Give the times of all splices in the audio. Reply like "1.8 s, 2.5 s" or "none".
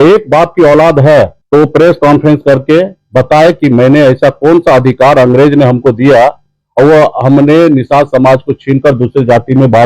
1.4 s